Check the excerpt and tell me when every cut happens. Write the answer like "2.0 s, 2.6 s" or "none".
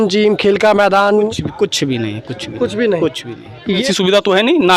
3.7 s